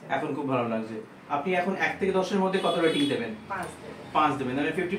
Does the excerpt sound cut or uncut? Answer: cut